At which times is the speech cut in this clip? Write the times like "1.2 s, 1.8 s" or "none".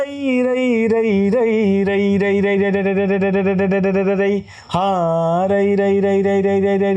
none